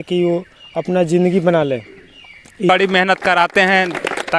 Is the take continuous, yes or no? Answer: no